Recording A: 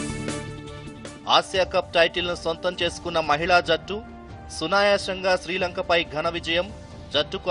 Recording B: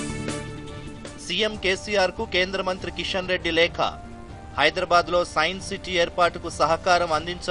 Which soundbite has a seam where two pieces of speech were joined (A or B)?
B